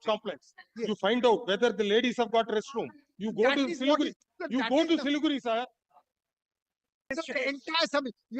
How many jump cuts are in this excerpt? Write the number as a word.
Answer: one